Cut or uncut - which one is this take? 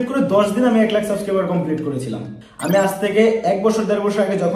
cut